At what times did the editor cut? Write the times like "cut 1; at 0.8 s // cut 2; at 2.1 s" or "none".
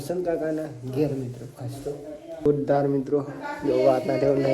cut 1; at 2.5 s